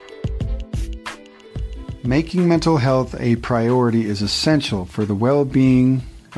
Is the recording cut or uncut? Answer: cut